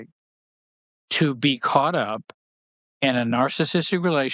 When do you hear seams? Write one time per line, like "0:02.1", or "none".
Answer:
none